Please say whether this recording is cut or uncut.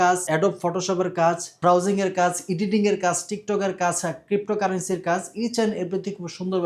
uncut